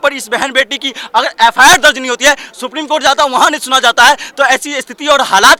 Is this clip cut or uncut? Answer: uncut